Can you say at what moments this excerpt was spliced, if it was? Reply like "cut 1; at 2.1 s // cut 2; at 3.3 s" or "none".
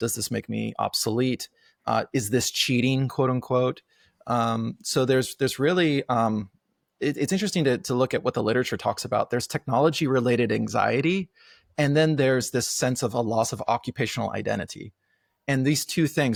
none